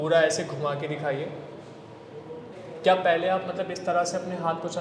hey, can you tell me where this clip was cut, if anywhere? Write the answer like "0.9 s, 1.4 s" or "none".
2.5 s